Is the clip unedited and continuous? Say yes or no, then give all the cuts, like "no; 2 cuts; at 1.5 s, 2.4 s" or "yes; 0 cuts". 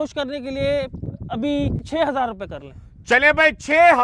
no; 1 cut; at 1.8 s